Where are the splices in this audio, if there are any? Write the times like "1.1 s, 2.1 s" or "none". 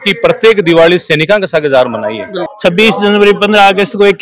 2.4 s